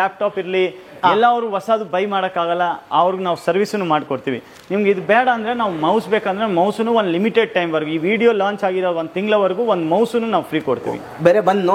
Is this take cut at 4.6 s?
yes; 1 cut; at 4.6 s

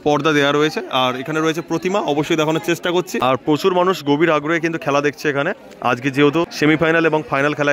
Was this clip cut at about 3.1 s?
yes; 2 cuts; at 3.1 s, 6.5 s

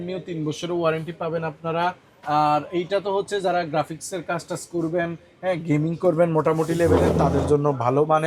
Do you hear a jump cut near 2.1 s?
no; 0 cuts

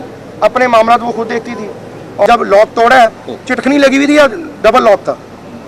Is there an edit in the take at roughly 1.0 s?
no; 1 cut; at 2.3 s

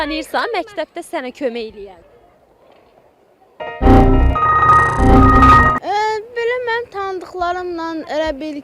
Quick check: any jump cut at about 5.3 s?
no; 0 cuts

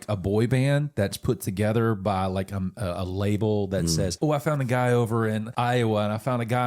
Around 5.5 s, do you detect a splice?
yes; 2 cuts; at 4.1 s, 5.5 s

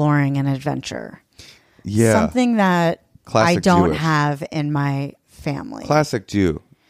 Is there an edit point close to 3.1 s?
yes; 1 cut; at 3.1 s

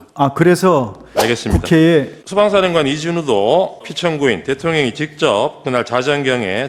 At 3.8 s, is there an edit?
yes; 2 cuts; at 2.2 s, 3.8 s

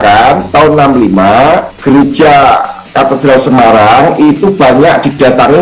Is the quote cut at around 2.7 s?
no; 0 cuts

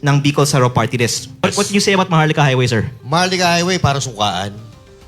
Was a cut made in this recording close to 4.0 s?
no; 1 cut; at 1.4 s

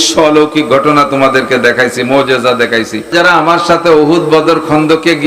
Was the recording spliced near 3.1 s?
yes; 1 cut; at 3.1 s

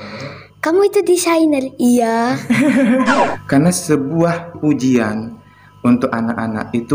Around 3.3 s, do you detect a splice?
yes; 1 cut; at 3.3 s

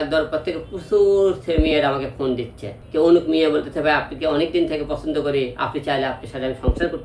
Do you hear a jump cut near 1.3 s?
no; 1 cut; at 2.7 s

